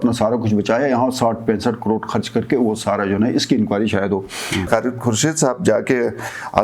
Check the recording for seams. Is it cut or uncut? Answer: cut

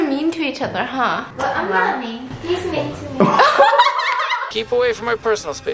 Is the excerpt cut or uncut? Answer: cut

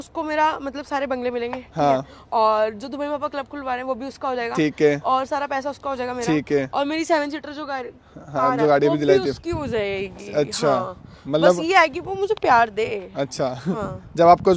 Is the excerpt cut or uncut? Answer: uncut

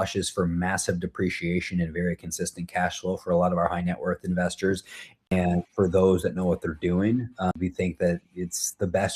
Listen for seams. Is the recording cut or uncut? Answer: cut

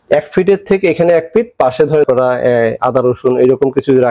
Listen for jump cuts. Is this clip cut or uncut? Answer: cut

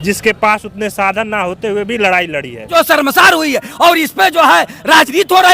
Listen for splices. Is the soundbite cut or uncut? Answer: cut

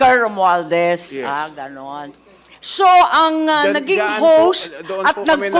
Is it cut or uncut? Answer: uncut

